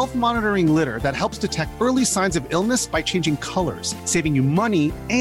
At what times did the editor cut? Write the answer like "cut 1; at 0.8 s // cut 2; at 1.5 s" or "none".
none

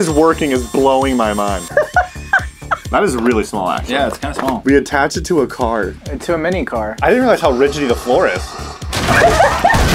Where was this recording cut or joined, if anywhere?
cut 1; at 1.6 s // cut 2; at 2.8 s // cut 3; at 4.6 s // cut 4; at 7.0 s

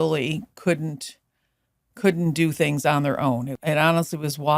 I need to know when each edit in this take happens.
cut 1; at 3.5 s

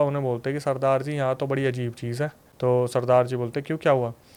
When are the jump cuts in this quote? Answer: none

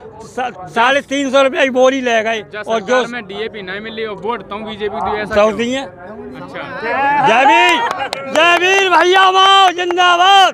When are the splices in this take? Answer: none

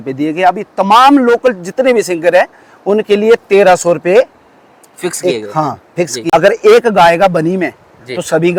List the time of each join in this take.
none

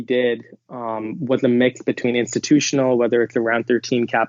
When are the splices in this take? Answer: none

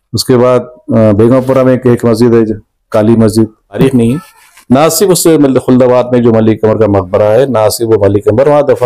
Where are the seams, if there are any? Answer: cut 1; at 3.8 s

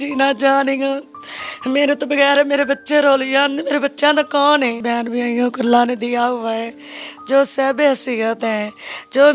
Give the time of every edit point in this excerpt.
cut 1; at 4.8 s

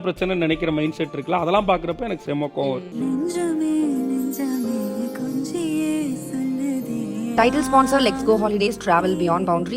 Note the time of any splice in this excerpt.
cut 1; at 2.9 s

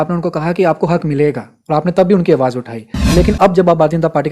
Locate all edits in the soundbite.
cut 1; at 3.0 s

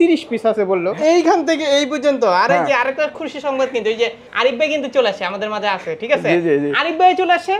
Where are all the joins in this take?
cut 1; at 0.9 s // cut 2; at 4.2 s

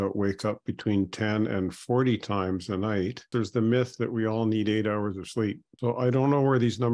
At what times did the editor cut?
cut 1; at 3.3 s // cut 2; at 5.7 s

